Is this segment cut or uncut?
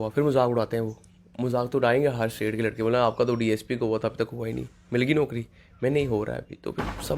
uncut